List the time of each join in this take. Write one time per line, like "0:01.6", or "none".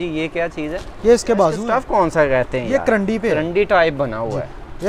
0:01.6